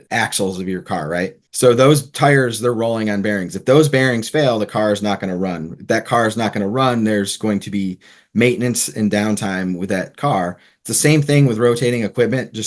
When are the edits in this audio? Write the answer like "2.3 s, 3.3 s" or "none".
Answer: 1.4 s